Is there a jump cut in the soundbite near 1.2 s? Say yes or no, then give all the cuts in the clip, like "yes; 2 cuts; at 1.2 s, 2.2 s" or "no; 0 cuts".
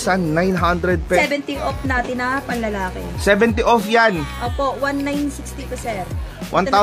yes; 1 cut; at 1.2 s